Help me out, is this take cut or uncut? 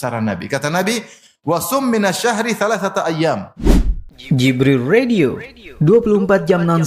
cut